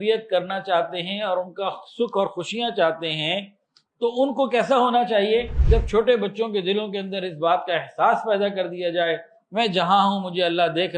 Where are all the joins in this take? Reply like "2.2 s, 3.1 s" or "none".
5.6 s